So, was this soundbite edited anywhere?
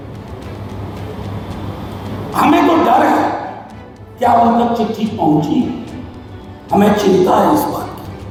no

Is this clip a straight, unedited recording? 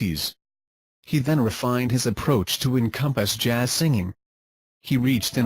no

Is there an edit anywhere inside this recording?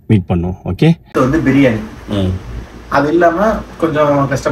yes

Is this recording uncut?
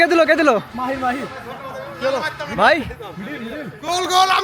yes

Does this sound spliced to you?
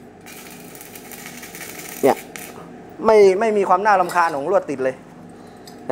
no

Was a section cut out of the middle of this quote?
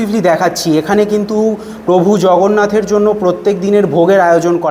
no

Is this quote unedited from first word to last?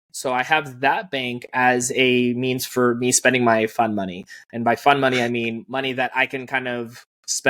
yes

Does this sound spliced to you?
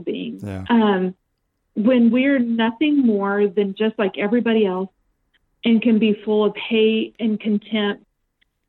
no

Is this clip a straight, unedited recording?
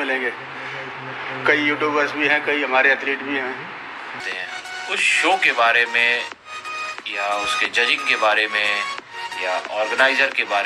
no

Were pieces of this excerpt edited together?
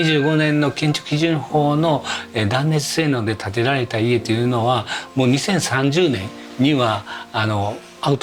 no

